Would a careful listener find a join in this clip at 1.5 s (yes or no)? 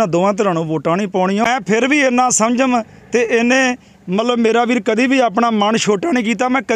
yes